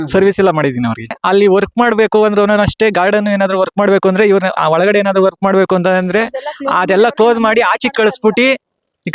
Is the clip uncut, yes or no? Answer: no